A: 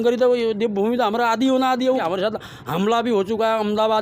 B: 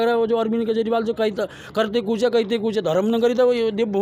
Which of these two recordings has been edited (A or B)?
A